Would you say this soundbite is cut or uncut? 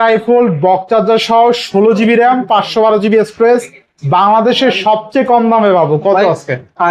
uncut